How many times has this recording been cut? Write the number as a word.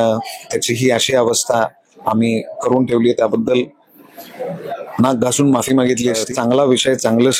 one